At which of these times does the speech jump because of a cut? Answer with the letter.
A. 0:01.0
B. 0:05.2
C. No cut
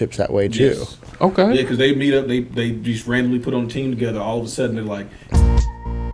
B